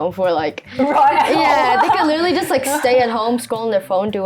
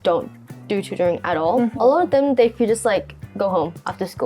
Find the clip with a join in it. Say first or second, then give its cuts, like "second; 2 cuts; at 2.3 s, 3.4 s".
second; 1 cut; at 1.7 s